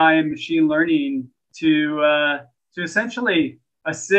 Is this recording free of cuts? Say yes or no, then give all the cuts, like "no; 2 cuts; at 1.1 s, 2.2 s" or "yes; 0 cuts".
yes; 0 cuts